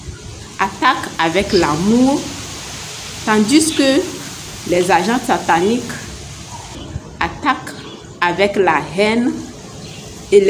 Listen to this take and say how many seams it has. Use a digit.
1